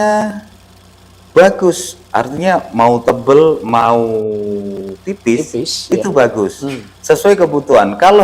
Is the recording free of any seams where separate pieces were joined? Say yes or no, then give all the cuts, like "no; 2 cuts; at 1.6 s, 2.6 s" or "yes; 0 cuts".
yes; 0 cuts